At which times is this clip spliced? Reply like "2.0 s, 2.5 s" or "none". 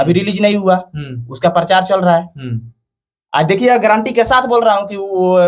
none